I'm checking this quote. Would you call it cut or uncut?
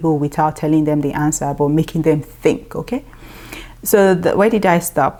uncut